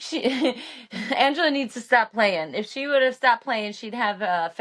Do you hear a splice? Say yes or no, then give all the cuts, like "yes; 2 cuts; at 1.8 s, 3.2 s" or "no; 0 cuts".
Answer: no; 0 cuts